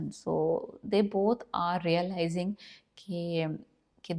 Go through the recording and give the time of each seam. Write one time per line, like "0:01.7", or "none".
none

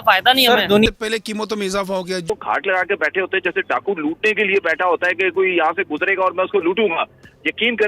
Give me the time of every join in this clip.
0:00.9
0:02.3

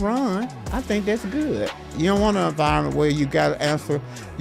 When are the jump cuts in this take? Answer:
0:01.9

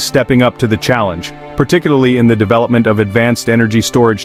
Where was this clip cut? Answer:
none

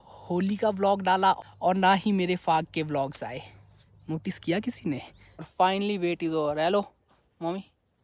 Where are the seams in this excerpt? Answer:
0:01.4
0:05.5

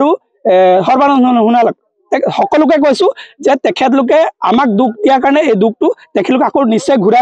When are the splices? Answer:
none

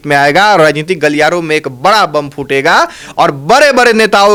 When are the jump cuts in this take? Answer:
none

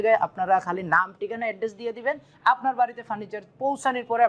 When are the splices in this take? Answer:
none

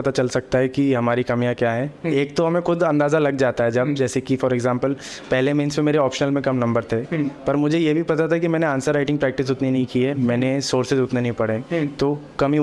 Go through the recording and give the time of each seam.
none

